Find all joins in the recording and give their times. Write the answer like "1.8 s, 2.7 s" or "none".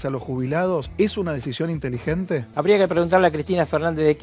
0.9 s, 2.5 s